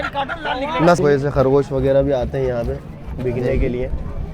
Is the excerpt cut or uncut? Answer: cut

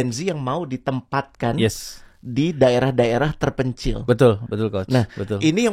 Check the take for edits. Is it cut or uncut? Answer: uncut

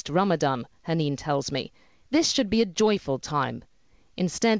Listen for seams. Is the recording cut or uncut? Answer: uncut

